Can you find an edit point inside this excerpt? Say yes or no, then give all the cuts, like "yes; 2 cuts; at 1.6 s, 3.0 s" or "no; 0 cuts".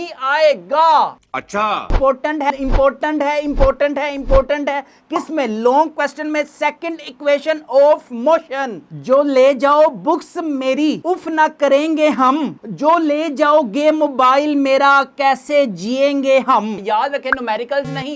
yes; 2 cuts; at 1.9 s, 16.8 s